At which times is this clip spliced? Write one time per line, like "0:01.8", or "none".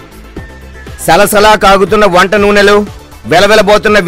0:01.0